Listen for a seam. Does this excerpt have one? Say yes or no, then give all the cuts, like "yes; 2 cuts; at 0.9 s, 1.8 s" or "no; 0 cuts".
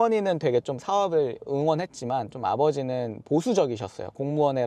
no; 0 cuts